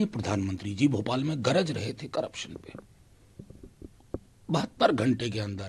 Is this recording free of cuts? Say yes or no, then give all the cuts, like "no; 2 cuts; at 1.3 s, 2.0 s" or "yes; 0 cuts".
yes; 0 cuts